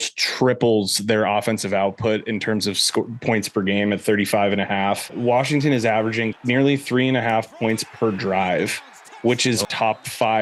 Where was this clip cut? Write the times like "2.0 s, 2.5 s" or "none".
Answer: none